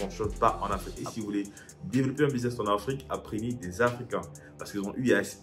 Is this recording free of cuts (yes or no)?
no